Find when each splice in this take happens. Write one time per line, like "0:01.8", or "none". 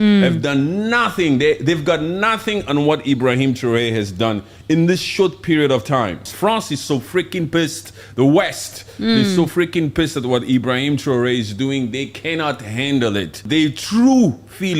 0:06.3
0:13.5